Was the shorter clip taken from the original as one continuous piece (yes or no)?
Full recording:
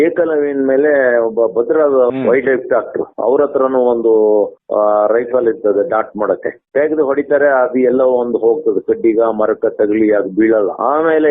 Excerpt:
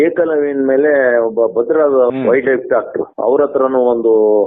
yes